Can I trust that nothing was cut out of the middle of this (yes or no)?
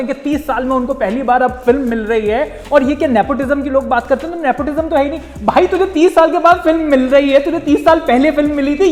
yes